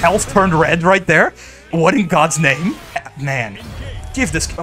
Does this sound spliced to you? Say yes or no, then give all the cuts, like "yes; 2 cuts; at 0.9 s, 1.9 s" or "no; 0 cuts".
yes; 2 cuts; at 1.7 s, 3.1 s